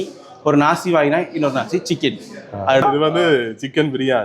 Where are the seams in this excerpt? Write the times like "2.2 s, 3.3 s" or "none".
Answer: 2.8 s